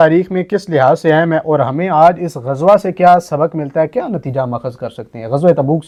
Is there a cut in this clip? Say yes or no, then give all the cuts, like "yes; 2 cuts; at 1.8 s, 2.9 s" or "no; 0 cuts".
no; 0 cuts